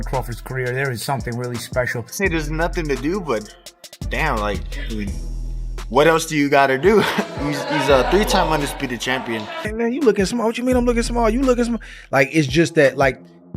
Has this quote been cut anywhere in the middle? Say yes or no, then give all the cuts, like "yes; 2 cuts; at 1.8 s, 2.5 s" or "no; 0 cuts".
yes; 2 cuts; at 2.2 s, 9.7 s